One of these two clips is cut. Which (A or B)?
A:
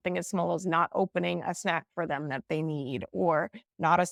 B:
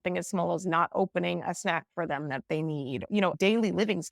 B